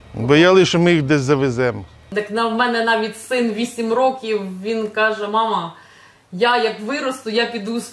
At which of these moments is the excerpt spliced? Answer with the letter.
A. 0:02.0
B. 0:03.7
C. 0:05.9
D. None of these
A